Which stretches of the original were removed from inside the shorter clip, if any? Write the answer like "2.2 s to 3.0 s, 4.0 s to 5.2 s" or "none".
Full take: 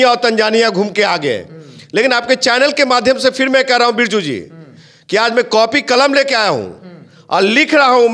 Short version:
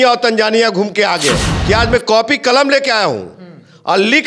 1.5 s to 4.9 s